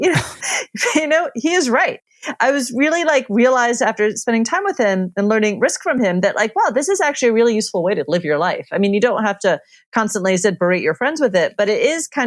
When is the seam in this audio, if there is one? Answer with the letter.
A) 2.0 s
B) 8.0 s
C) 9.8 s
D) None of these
A